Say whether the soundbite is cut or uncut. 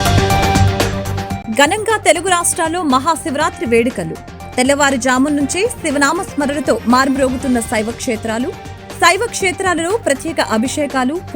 cut